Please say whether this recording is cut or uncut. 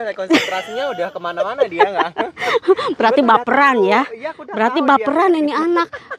uncut